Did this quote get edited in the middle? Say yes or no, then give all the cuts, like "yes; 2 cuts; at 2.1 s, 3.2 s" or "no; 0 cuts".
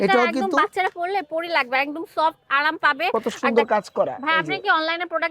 yes; 1 cut; at 3.1 s